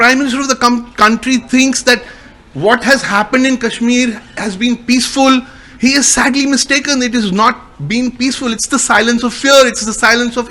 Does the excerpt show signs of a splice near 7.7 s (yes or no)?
no